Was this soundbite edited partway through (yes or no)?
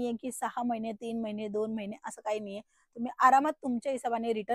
no